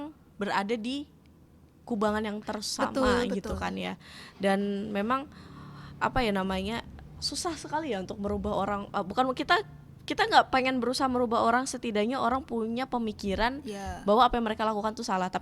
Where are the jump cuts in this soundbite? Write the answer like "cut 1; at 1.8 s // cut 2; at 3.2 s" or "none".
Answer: none